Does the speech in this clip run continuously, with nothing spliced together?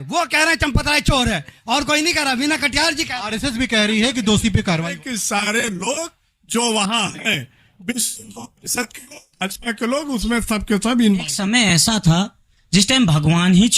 no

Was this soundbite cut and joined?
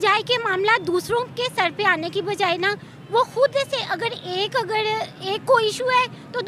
no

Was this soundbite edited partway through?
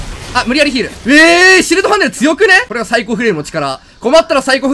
yes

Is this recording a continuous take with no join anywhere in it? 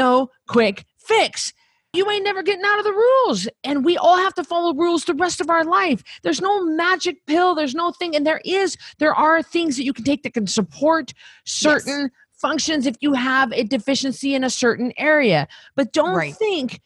no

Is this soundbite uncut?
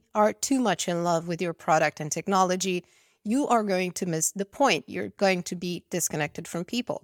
yes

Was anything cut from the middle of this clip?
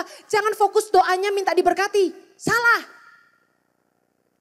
no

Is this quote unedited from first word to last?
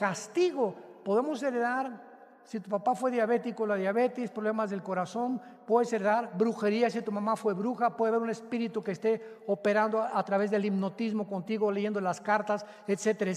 yes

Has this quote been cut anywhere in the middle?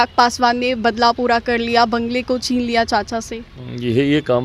no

